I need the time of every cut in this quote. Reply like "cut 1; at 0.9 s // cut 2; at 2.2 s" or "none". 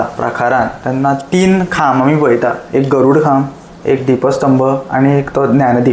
none